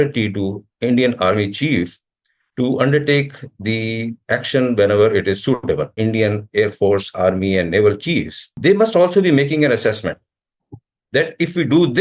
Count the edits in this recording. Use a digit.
2